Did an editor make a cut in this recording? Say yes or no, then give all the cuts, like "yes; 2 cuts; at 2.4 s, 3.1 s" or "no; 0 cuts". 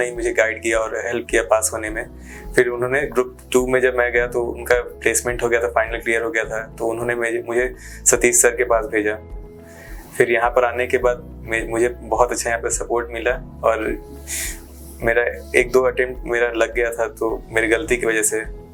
no; 0 cuts